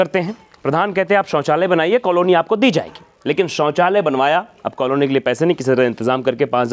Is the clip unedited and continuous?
yes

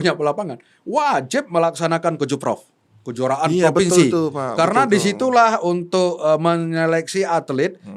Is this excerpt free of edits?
yes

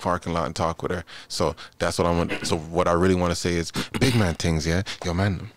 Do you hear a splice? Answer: no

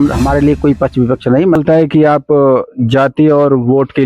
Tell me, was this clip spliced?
yes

